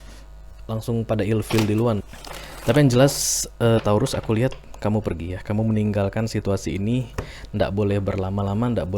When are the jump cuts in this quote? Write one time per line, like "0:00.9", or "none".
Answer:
0:02.1